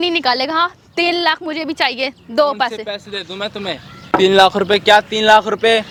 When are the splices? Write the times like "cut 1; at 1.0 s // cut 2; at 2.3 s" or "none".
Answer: none

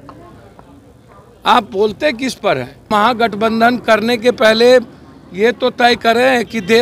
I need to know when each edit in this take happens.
cut 1; at 2.9 s

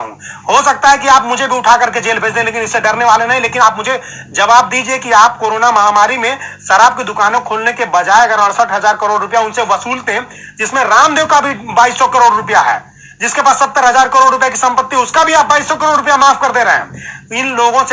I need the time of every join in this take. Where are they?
none

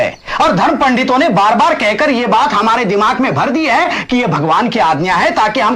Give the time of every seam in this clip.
none

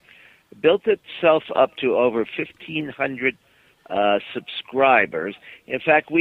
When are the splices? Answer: none

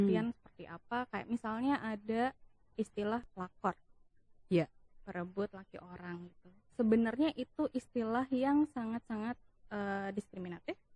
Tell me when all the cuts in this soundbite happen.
none

